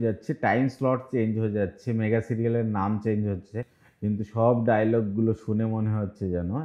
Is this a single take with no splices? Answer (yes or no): yes